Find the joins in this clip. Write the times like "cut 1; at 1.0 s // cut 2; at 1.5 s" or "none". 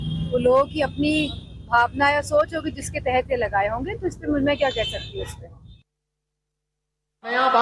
none